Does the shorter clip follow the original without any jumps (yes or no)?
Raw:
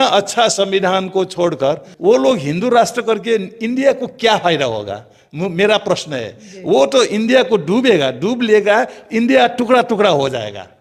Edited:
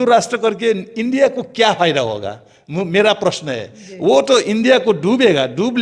yes